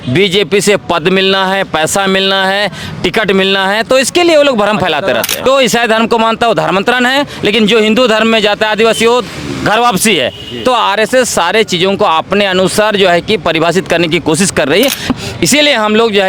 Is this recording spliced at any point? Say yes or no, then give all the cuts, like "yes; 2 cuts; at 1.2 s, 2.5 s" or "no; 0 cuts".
yes; 2 cuts; at 5.4 s, 15.1 s